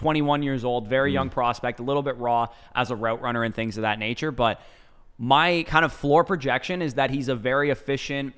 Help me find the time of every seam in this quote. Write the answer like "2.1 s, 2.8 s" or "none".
none